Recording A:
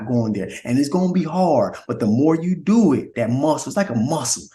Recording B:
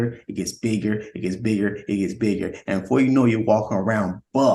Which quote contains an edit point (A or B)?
A